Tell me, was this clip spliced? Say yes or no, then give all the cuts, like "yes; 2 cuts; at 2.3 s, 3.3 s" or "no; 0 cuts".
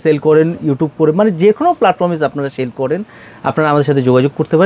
no; 0 cuts